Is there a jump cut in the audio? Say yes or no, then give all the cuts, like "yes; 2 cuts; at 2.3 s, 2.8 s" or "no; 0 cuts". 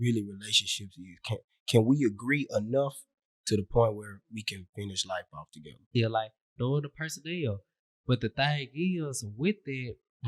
yes; 1 cut; at 5.9 s